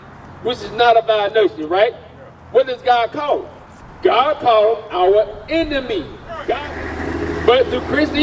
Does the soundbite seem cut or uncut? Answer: cut